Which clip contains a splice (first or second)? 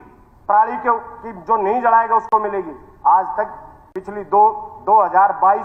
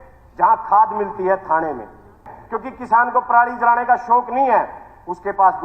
second